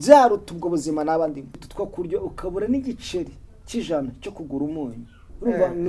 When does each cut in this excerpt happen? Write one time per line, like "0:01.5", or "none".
0:01.6

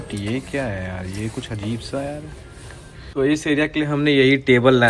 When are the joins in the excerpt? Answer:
0:03.1

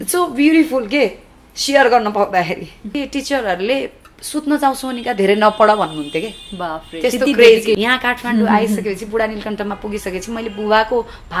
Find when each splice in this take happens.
0:03.0
0:07.8

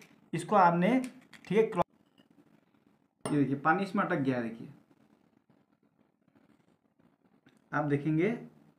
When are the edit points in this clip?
0:01.8

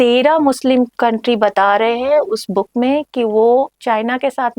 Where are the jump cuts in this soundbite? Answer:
0:00.9

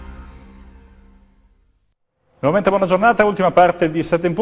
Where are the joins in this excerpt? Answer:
0:01.5

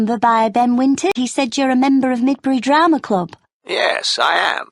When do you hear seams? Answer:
0:01.1

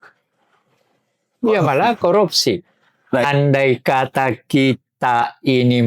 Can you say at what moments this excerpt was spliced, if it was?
0:03.2

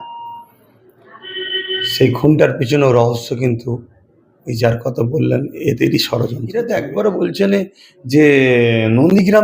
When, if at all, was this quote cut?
0:06.4

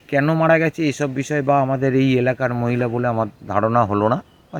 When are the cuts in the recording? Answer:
none

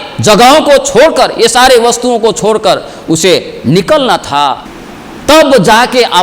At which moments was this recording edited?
0:04.6

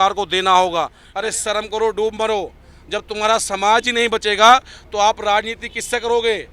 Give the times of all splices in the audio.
0:01.0

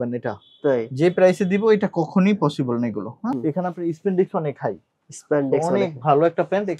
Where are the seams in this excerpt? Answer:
0:03.3

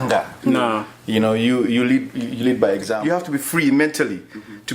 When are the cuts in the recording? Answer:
0:03.0

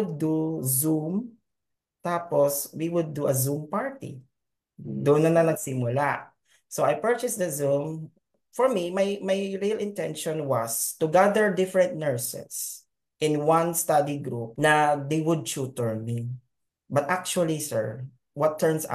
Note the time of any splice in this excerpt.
0:08.4

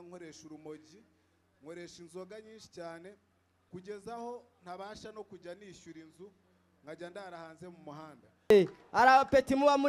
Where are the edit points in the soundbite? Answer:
0:08.5

